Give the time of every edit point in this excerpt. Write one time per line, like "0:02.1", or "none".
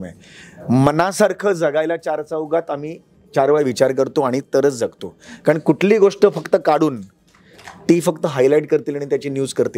none